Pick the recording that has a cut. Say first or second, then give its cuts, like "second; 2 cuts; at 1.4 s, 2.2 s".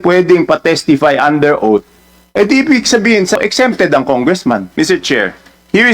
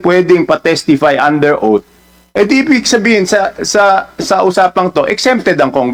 first; 2 cuts; at 3.4 s, 4.7 s